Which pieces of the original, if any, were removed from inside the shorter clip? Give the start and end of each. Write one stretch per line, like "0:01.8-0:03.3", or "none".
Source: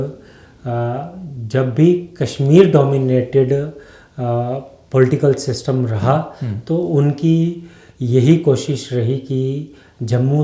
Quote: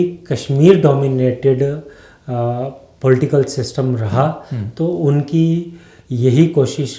none